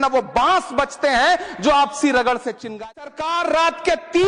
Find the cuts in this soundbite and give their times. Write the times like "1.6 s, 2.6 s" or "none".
3.0 s